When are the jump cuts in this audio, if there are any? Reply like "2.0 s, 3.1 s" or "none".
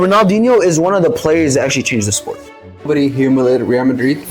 2.9 s